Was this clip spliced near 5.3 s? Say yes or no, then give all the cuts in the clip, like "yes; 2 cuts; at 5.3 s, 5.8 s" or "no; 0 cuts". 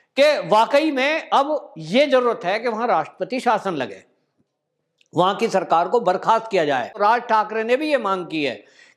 no; 1 cut; at 6.9 s